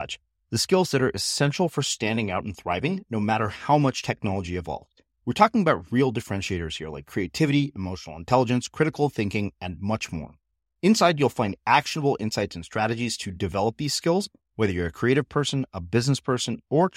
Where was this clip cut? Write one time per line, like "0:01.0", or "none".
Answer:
none